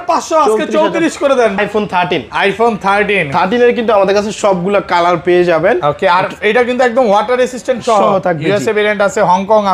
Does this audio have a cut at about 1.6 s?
yes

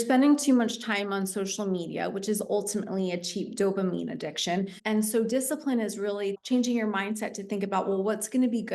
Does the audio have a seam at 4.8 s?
yes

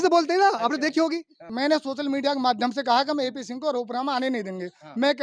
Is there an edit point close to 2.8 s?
no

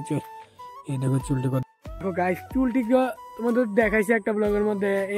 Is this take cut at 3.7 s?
no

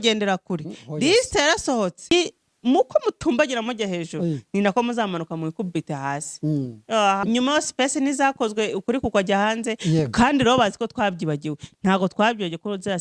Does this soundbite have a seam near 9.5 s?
no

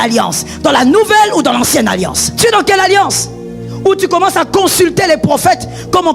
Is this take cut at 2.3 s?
yes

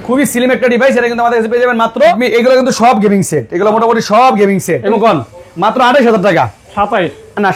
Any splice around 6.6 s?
no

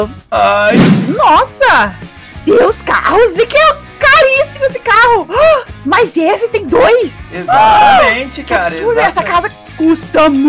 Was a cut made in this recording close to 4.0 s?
no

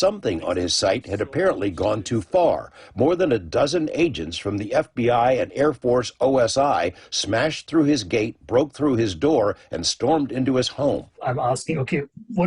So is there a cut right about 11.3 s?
yes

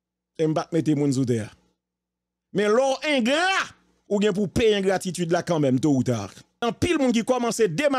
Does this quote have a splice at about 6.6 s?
yes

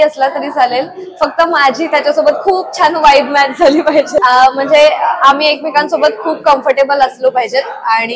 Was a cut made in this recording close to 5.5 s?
no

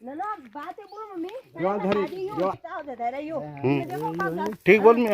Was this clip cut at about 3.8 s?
yes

